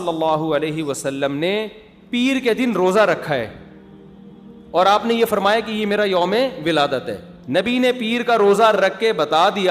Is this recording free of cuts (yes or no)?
no